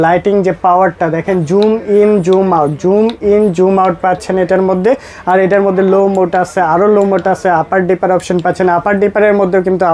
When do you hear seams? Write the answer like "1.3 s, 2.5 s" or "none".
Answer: none